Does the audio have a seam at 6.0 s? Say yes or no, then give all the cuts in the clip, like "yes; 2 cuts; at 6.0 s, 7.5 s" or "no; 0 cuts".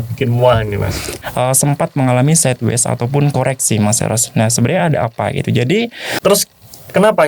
yes; 2 cuts; at 1.1 s, 6.0 s